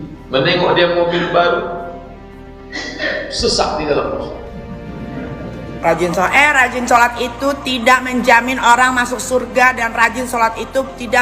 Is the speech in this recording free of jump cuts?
no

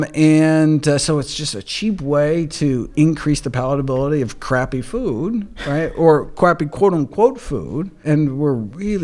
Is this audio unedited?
no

